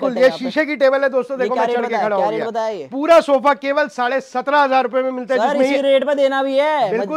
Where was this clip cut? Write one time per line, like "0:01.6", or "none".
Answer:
none